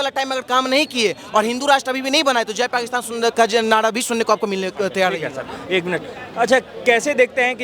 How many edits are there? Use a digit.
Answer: 0